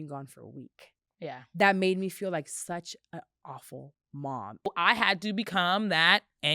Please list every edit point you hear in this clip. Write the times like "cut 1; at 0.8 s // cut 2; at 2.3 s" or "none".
cut 1; at 4.7 s